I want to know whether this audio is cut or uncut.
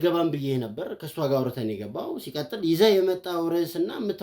uncut